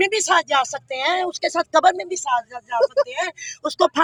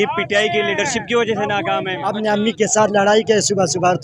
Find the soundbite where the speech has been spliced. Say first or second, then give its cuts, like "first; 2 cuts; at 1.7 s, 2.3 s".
second; 1 cut; at 2.0 s